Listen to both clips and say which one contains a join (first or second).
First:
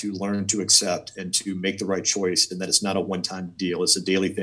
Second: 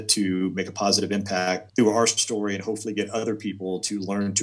second